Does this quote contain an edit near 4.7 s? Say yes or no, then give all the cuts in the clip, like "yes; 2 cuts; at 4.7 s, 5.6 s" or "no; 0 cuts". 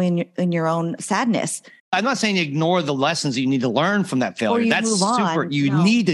no; 1 cut; at 1.9 s